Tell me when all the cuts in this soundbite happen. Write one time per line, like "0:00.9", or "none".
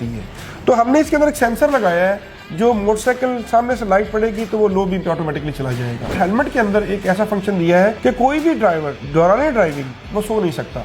0:06.1
0:08.0
0:09.0